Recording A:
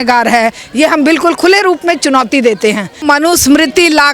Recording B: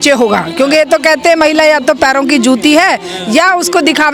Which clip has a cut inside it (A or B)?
A